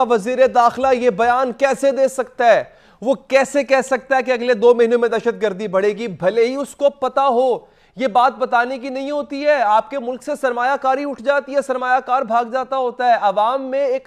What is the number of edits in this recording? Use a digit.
0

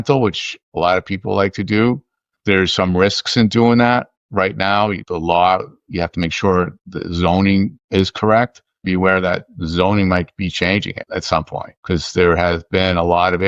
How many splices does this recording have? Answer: 1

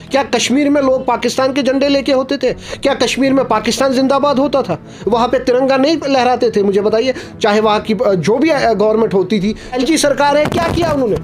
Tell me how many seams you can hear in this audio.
1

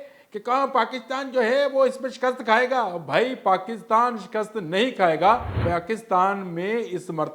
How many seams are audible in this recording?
1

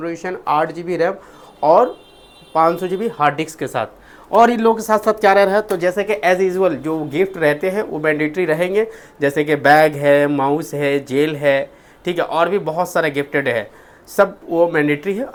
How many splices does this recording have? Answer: 0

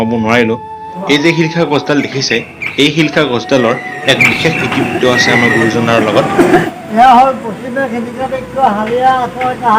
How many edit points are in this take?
2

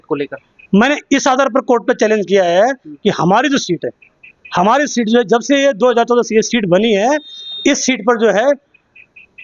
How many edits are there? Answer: 0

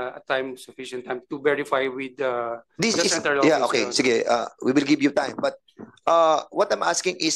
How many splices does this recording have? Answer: 0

